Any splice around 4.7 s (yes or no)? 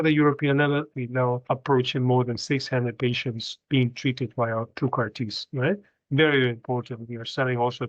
no